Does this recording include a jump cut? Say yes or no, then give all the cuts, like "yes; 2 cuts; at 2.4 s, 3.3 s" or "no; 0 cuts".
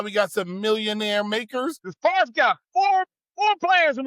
yes; 1 cut; at 1.8 s